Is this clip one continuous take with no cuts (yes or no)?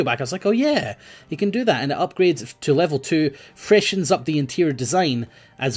yes